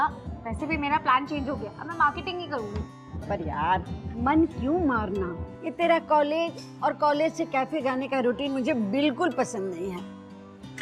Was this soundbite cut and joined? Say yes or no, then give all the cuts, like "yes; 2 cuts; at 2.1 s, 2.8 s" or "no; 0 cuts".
yes; 1 cut; at 5.8 s